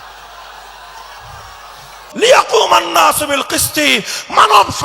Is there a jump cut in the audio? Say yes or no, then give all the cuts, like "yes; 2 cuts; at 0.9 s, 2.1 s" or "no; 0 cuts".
yes; 1 cut; at 2.0 s